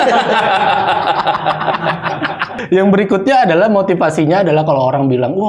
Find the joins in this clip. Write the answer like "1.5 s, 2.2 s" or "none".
2.6 s